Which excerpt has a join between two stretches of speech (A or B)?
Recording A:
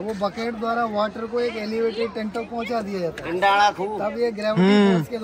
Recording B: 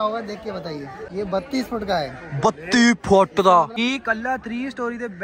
B